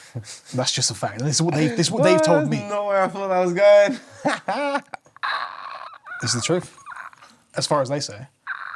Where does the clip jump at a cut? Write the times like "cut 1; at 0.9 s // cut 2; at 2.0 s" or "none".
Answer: none